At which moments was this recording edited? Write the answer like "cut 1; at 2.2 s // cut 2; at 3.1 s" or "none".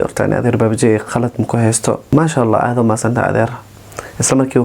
cut 1; at 2.0 s